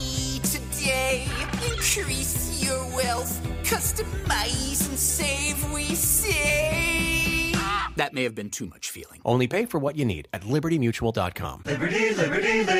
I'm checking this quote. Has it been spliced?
no; 0 cuts

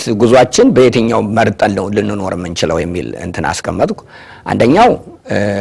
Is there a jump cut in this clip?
no; 0 cuts

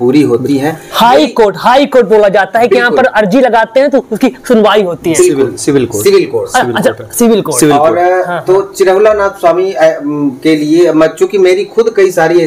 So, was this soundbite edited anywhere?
no; 0 cuts

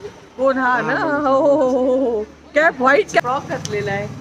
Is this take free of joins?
no; 1 cut; at 3.1 s

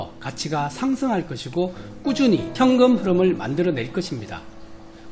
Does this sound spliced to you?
yes; 1 cut; at 2.5 s

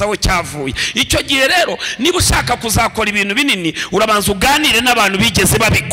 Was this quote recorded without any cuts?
yes; 0 cuts

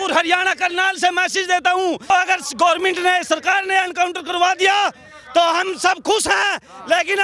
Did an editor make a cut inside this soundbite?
no; 0 cuts

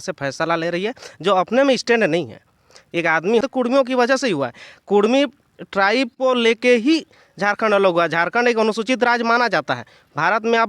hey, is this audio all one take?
no; 1 cut; at 3.4 s

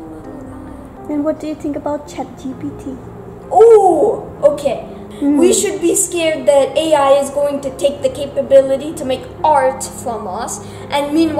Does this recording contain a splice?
yes; 2 cuts; at 1.0 s, 5.0 s

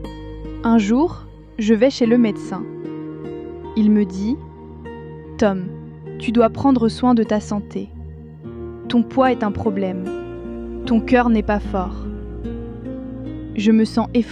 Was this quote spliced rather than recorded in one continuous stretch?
no; 0 cuts

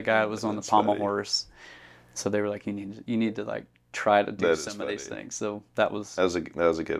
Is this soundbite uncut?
yes; 0 cuts

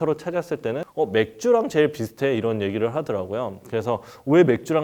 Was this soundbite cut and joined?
no; 0 cuts

